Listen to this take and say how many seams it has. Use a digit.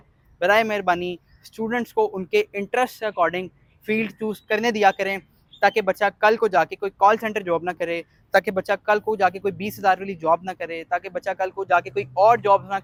0